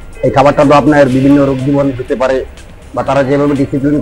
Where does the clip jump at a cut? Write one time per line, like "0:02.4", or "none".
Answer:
none

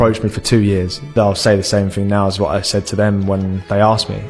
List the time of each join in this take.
0:01.4

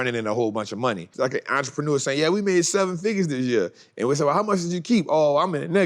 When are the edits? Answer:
0:01.1

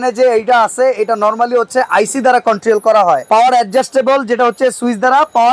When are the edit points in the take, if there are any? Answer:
none

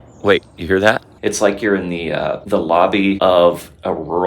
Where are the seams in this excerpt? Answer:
0:01.1
0:02.4
0:03.2

